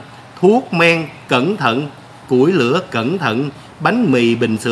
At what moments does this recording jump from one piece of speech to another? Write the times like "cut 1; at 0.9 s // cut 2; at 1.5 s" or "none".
none